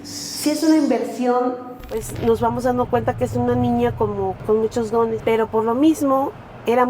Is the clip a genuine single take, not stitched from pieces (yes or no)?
no